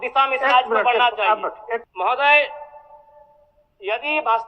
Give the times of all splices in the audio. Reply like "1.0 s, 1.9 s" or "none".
1.9 s